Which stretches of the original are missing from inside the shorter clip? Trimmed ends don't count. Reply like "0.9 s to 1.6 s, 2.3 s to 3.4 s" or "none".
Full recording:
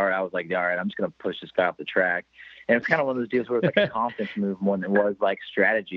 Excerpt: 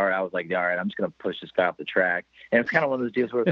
2.3 s to 2.5 s